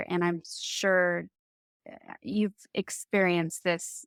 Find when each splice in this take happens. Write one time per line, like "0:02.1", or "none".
none